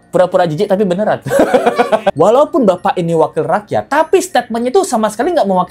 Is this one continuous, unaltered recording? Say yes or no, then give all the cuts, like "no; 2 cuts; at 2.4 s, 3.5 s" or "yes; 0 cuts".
no; 1 cut; at 2.1 s